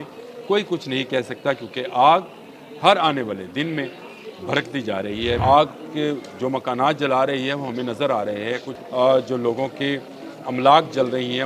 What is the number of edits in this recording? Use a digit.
2